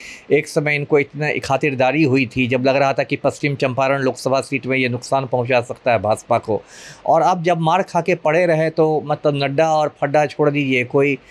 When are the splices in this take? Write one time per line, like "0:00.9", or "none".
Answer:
none